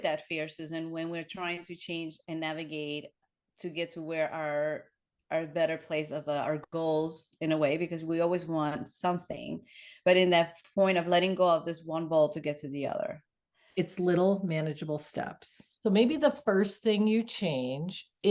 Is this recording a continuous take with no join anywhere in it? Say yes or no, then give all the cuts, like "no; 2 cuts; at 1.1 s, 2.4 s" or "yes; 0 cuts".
yes; 0 cuts